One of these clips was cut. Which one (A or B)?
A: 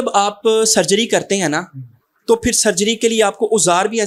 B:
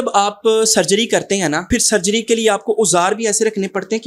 B